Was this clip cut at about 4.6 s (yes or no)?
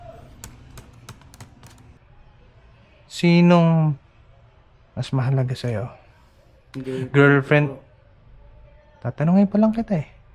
no